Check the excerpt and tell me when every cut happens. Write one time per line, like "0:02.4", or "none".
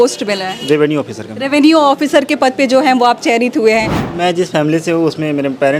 0:04.0